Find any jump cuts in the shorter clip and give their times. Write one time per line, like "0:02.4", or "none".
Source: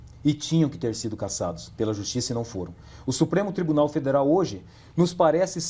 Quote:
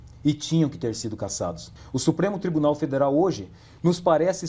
0:01.6